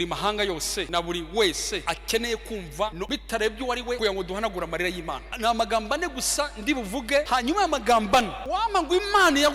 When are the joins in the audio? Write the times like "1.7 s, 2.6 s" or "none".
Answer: 0.9 s, 1.8 s, 3.0 s, 4.0 s, 5.3 s, 7.3 s, 8.4 s